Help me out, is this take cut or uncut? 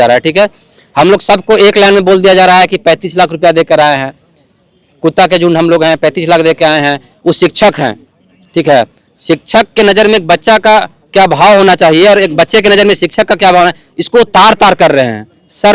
uncut